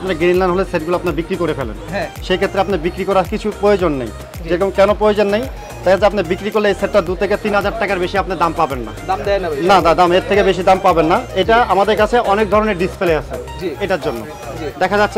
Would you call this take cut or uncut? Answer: uncut